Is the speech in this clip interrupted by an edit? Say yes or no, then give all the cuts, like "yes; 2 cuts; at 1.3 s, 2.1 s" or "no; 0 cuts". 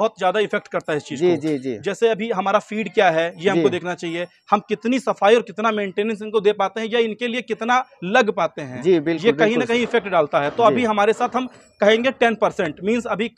no; 0 cuts